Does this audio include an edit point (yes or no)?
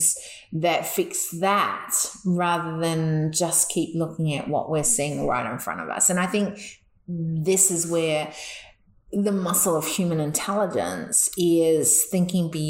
no